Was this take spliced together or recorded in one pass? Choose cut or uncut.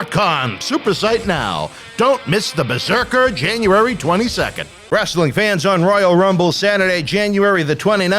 cut